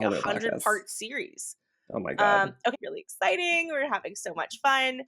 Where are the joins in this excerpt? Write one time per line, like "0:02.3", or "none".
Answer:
0:02.9